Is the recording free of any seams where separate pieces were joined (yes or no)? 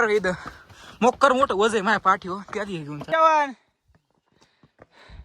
no